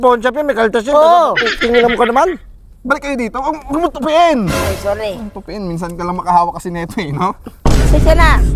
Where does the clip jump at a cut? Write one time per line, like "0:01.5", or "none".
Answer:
none